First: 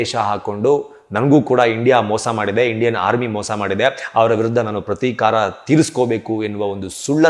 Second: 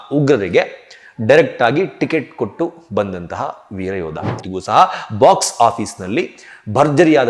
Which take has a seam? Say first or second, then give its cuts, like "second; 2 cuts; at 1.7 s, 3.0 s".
second; 1 cut; at 4.4 s